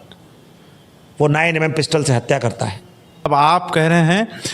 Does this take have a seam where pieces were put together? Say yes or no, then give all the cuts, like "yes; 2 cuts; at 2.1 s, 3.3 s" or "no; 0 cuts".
yes; 1 cut; at 3.3 s